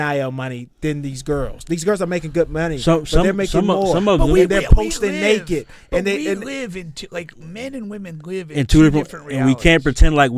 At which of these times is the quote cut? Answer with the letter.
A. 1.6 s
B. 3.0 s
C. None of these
C